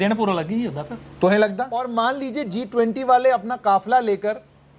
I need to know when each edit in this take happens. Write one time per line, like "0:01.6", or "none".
0:01.9